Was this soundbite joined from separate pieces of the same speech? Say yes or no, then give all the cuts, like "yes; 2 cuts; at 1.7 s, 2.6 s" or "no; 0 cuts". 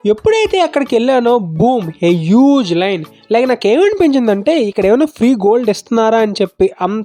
no; 0 cuts